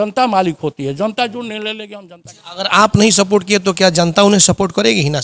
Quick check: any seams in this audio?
yes; 1 cut; at 1.9 s

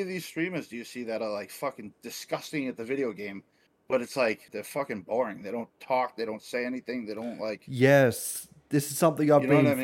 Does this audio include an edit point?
yes; 1 cut; at 4.5 s

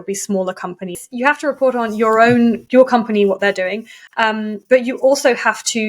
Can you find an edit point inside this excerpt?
yes; 1 cut; at 1.0 s

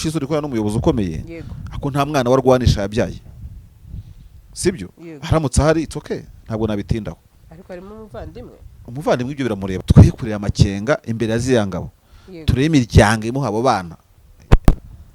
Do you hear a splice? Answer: yes; 1 cut; at 9.7 s

